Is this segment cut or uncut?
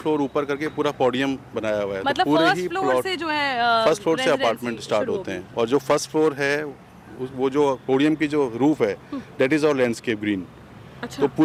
uncut